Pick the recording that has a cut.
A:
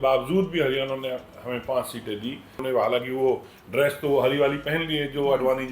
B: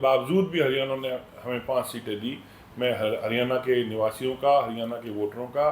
A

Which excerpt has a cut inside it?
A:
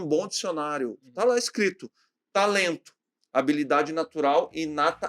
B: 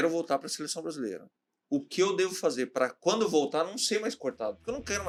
A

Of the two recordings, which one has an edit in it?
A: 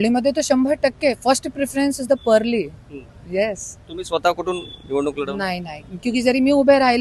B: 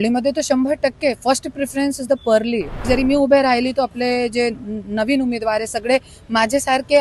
B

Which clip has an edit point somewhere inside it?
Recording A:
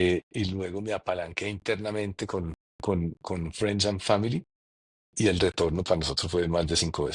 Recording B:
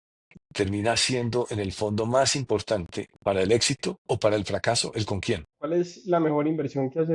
B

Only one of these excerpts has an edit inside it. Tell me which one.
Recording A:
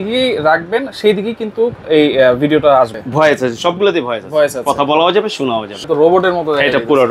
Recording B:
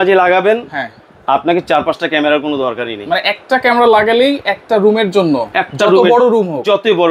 A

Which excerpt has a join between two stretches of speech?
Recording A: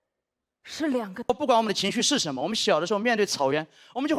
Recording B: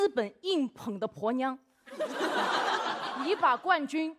A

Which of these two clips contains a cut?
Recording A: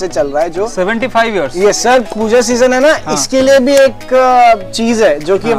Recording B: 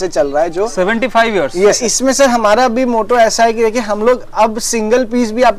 A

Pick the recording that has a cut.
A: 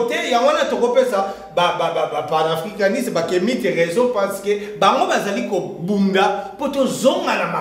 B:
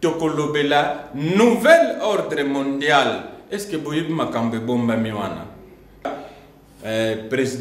B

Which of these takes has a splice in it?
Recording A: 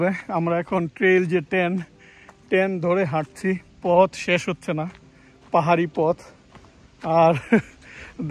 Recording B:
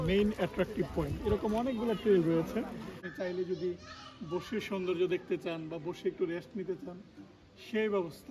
B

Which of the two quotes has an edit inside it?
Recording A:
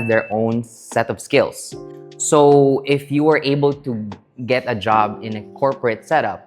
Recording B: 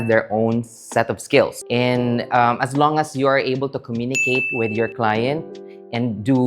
B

